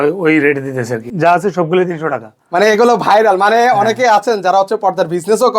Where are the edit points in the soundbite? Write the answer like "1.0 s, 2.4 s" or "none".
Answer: 1.1 s

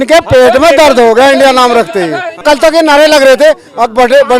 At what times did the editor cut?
2.4 s

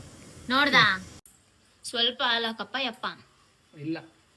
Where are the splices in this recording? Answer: 1.0 s

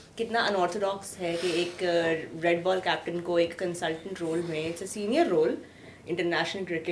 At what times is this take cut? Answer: none

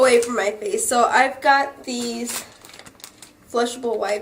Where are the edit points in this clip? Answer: 1.4 s

